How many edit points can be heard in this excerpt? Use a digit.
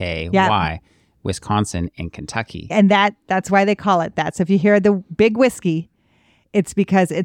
1